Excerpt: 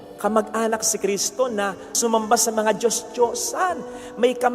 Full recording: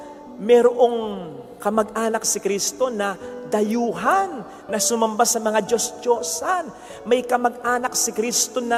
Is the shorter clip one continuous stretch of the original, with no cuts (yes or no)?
no